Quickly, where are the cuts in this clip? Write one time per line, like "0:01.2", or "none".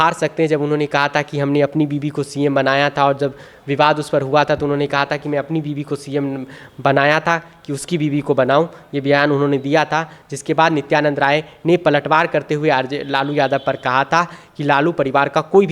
none